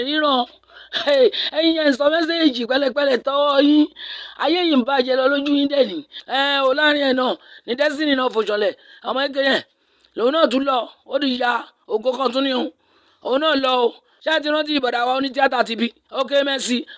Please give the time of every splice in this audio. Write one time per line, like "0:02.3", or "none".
0:06.1
0:14.1
0:16.0